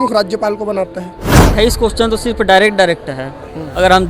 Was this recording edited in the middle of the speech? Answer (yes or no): yes